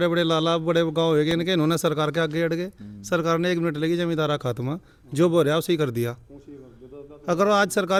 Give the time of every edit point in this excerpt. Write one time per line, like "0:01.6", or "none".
none

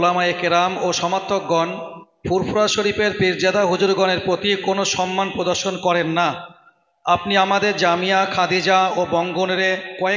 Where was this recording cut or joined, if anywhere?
none

